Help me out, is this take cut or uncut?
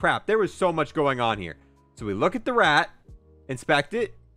uncut